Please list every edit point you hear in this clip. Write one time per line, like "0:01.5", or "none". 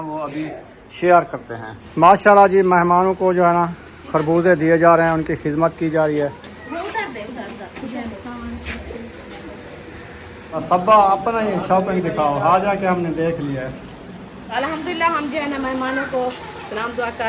0:01.8
0:06.5
0:10.6
0:14.5